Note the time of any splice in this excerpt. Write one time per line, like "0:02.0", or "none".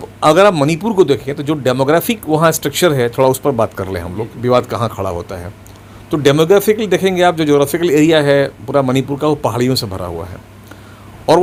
none